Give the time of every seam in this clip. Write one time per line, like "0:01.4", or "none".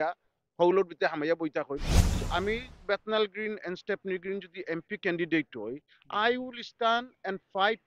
0:02.2